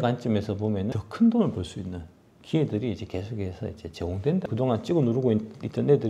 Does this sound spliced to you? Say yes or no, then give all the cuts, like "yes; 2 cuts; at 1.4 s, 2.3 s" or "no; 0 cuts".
yes; 2 cuts; at 0.9 s, 4.5 s